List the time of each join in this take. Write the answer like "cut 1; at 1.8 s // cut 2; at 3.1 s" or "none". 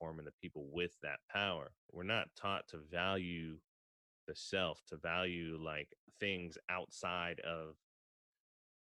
cut 1; at 1.9 s